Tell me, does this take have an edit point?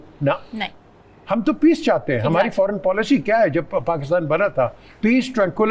no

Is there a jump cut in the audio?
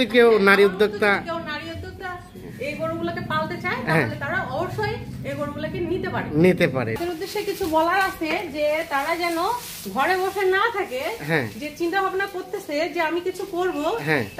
yes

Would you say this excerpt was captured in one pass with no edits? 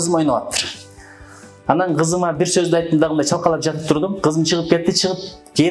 yes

